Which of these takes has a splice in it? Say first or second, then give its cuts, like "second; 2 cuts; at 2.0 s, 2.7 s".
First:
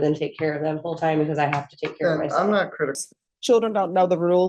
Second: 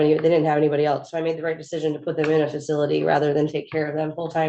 first; 1 cut; at 3.0 s